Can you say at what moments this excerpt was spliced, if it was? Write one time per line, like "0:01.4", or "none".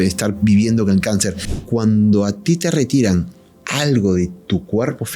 0:01.5